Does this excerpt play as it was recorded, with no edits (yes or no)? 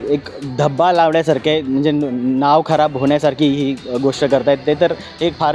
yes